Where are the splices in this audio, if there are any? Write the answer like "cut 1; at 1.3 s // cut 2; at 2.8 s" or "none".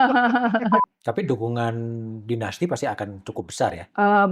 cut 1; at 0.9 s